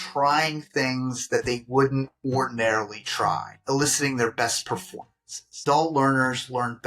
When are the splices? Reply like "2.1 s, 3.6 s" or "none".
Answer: 3.5 s, 5.5 s